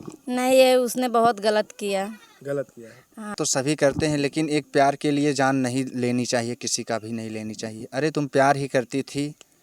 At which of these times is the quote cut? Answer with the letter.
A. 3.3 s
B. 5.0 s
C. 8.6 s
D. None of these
A